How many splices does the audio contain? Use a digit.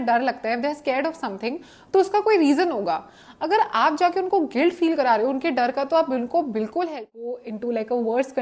1